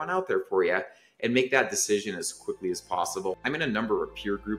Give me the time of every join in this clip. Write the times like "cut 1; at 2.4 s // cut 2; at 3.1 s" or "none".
cut 1; at 3.4 s